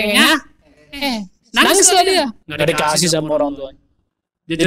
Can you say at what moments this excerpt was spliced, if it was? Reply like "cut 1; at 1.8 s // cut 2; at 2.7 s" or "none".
cut 1; at 1.3 s // cut 2; at 2.4 s

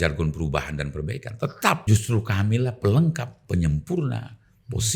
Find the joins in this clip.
cut 1; at 1.8 s

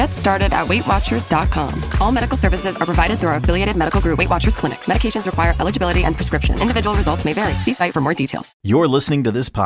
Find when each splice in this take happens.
cut 1; at 8.4 s

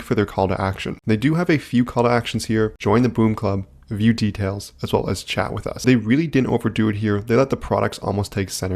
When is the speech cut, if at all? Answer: cut 1; at 5.8 s

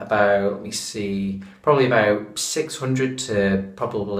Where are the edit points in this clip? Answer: cut 1; at 2.3 s

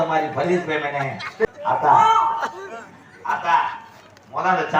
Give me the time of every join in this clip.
cut 1; at 1.4 s

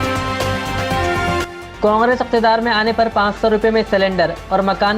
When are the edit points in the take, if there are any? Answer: cut 1; at 1.5 s

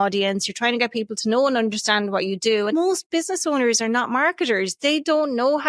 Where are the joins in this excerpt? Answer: cut 1; at 2.7 s

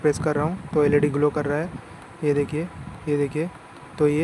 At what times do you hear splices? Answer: none

